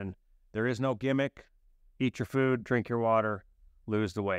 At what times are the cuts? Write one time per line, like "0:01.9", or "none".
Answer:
none